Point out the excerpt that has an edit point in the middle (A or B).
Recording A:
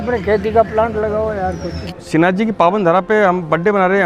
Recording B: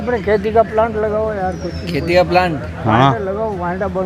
A